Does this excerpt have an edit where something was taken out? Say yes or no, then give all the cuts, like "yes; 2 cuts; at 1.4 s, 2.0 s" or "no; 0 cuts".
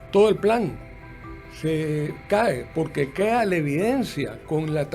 no; 0 cuts